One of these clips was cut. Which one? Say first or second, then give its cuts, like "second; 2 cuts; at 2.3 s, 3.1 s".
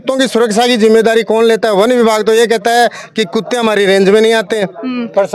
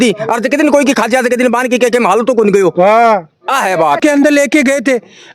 second; 1 cut; at 4.0 s